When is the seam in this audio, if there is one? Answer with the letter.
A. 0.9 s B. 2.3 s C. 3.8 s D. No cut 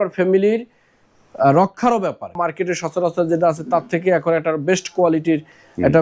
B